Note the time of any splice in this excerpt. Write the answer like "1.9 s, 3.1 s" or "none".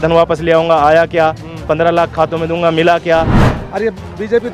3.4 s